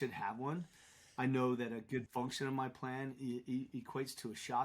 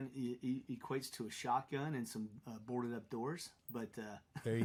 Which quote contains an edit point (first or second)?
first